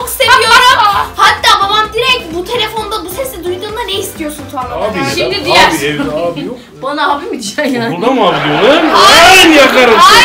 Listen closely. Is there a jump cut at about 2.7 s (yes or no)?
no